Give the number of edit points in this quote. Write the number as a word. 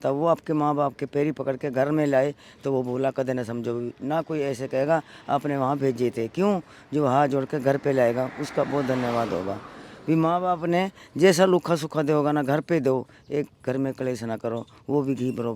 zero